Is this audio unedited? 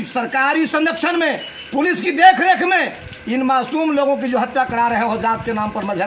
yes; 0 cuts

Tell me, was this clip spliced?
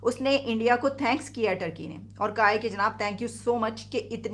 no; 0 cuts

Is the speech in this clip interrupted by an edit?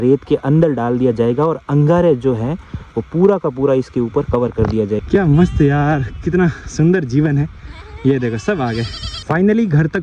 yes; 2 cuts; at 5.0 s, 9.1 s

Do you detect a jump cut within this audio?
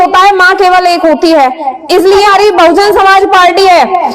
yes; 1 cut; at 2.3 s

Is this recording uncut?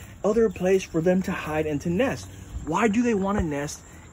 yes; 0 cuts

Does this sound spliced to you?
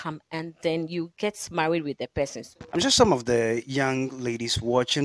no; 0 cuts

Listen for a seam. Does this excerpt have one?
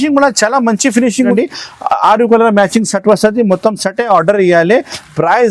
yes; 1 cut; at 1.3 s

